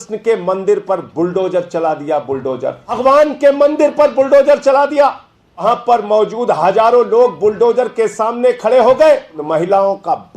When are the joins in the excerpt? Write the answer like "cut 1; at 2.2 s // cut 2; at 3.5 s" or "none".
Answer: cut 1; at 3.0 s // cut 2; at 5.6 s // cut 3; at 9.4 s